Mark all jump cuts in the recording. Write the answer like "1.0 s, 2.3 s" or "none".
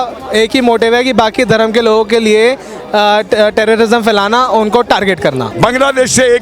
5.5 s